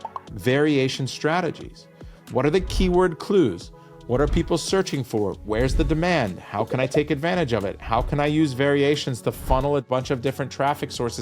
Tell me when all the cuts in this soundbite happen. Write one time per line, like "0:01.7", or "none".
0:09.8